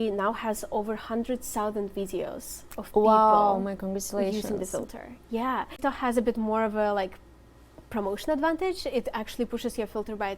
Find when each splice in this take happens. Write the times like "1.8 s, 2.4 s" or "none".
5.8 s

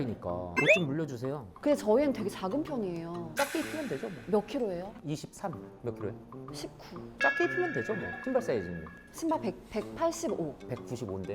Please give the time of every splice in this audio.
1.5 s, 3.3 s, 5.7 s

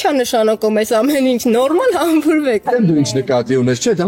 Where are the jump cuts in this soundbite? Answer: 2.6 s

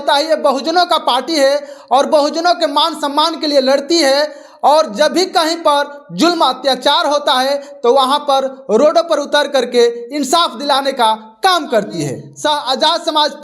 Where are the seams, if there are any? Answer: 12.2 s

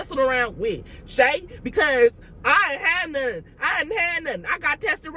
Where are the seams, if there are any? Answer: none

